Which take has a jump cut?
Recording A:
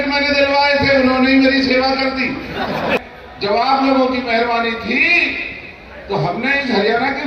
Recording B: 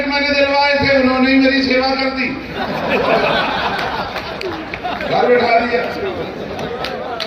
A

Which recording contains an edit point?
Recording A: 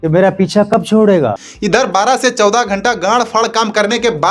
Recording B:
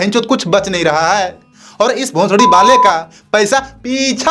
A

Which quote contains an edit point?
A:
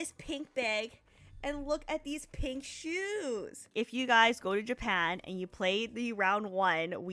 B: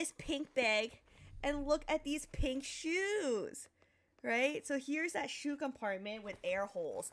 A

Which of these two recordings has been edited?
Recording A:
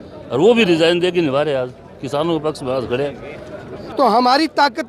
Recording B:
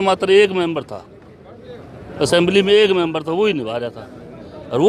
A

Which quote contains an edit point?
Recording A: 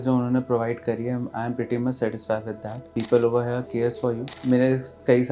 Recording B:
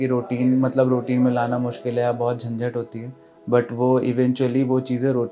A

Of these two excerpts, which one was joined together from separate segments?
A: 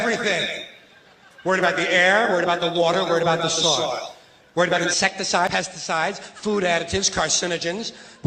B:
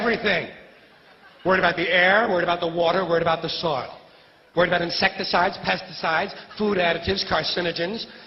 A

